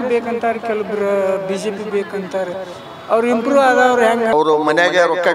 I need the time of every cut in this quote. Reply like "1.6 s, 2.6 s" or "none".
4.3 s